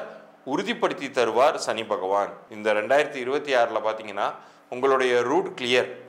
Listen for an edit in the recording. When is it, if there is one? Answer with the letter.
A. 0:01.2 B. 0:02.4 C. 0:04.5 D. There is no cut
B